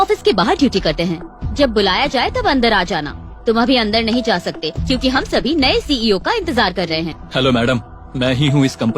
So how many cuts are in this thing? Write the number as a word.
one